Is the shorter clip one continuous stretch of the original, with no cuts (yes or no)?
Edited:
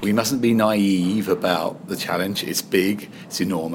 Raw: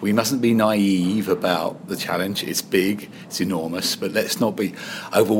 yes